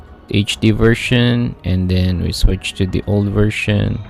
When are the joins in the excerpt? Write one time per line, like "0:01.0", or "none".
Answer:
none